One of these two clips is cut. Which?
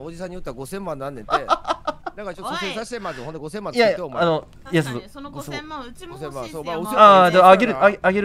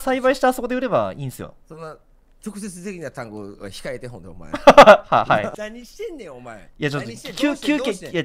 second; 2 cuts; at 1.6 s, 5.5 s

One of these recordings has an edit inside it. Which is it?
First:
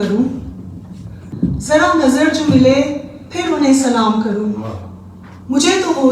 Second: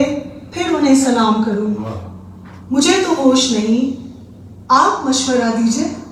first; 1 cut; at 1.3 s

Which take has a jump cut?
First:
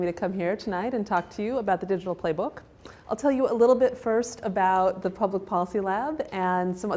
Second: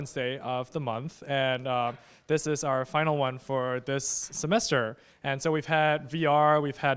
first; 1 cut; at 2.0 s

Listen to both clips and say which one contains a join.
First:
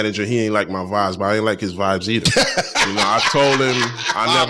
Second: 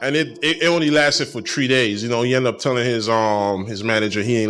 first; 1 cut; at 2.6 s

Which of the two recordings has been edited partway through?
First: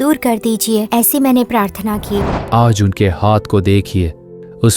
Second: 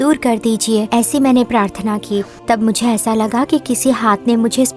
first; 1 cut; at 2.3 s

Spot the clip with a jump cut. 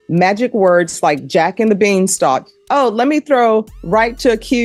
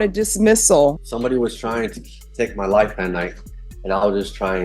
second; 1 cut; at 1.0 s

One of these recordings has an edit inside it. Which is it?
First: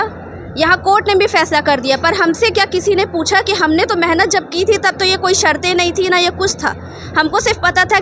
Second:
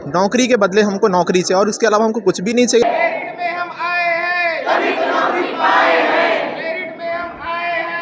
second; 1 cut; at 2.8 s

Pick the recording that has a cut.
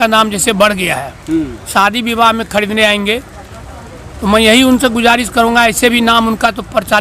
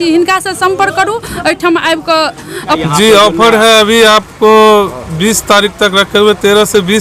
second; 1 cut; at 2.8 s

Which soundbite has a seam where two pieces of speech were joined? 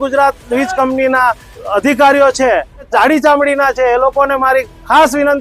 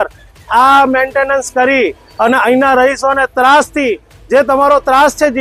first; 2 cuts; at 1.6 s, 2.9 s

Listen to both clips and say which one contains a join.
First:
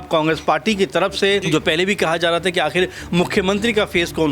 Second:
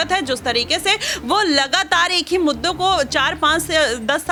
first; 1 cut; at 1.4 s

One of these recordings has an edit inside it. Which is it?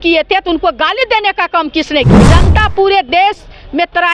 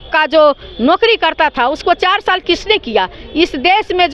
first; 1 cut; at 2.2 s

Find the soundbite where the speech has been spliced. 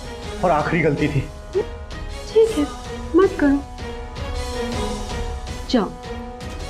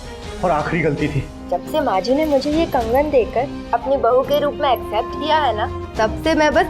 second; 1 cut; at 1.3 s

